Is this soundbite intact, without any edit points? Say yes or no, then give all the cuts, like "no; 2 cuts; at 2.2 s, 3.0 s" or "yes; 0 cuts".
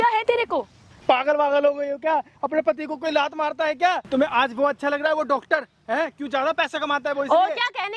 no; 2 cuts; at 0.9 s, 4.0 s